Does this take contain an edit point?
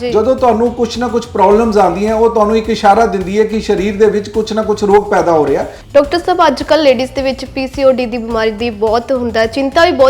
yes; 1 cut; at 5.8 s

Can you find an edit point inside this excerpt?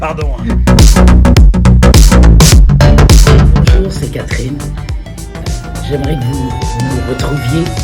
yes; 1 cut; at 3.8 s

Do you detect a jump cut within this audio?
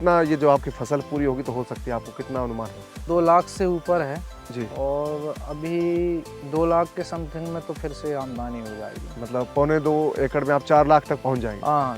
yes; 1 cut; at 3.0 s

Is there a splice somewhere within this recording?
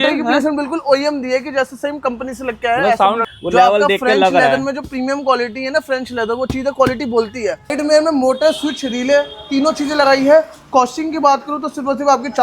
yes; 2 cuts; at 3.2 s, 7.7 s

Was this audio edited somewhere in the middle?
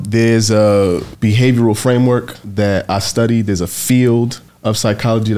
yes; 3 cuts; at 1.1 s, 2.4 s, 4.5 s

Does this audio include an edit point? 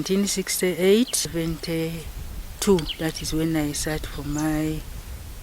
yes; 1 cut; at 1.3 s

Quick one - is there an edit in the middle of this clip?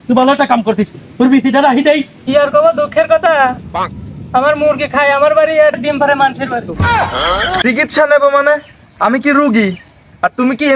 yes; 2 cuts; at 2.2 s, 7.5 s

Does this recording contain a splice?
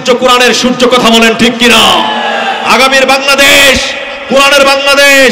no; 0 cuts

